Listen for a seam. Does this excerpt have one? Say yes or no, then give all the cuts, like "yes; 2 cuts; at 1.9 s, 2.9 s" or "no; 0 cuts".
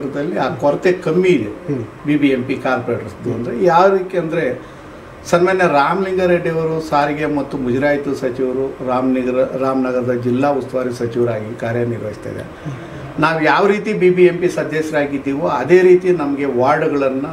no; 0 cuts